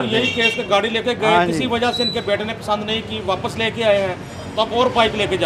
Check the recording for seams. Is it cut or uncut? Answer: uncut